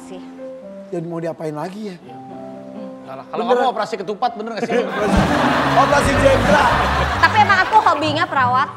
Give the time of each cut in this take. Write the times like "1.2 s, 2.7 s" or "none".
none